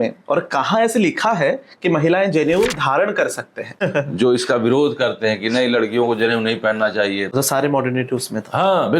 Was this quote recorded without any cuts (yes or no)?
no